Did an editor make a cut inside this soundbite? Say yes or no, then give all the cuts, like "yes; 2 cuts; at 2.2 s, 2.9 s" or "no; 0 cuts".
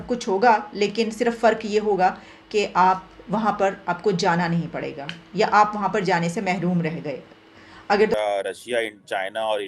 yes; 1 cut; at 8.1 s